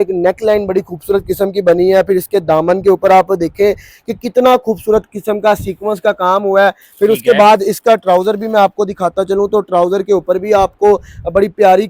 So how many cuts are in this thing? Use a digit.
0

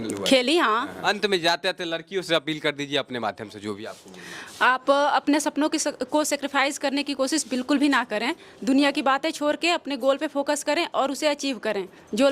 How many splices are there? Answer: 1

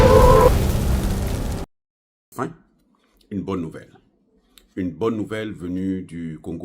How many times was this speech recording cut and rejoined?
1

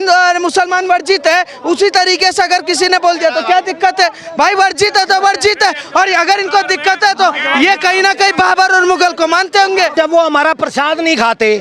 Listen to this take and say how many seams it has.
1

